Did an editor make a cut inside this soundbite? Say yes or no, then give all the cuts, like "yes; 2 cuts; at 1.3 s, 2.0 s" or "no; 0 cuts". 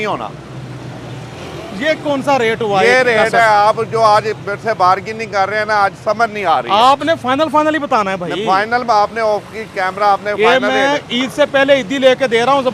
no; 0 cuts